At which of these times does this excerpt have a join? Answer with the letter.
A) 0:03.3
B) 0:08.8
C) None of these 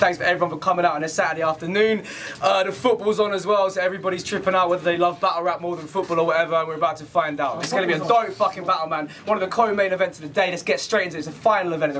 B